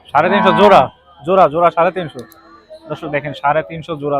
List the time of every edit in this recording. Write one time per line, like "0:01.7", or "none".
none